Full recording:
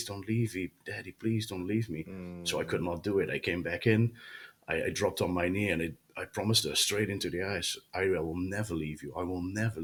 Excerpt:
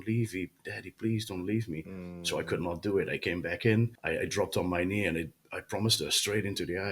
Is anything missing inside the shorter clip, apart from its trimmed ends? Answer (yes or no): yes